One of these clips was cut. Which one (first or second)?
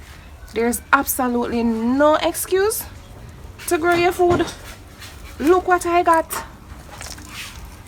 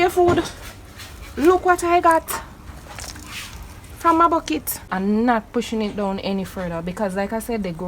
second